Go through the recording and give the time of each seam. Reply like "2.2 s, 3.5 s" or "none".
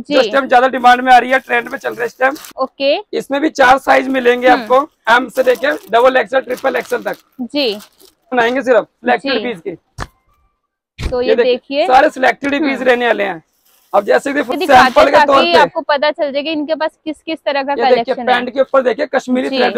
2.5 s, 8.3 s, 14.5 s